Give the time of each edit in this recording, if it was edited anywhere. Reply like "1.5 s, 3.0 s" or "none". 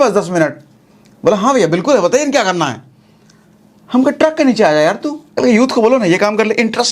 5.3 s